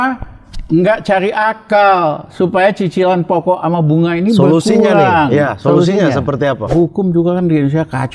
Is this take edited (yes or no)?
yes